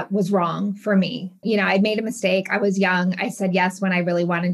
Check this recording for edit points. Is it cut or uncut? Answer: uncut